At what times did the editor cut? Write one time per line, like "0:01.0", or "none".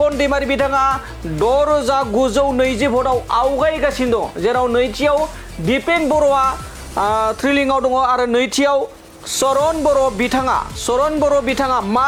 none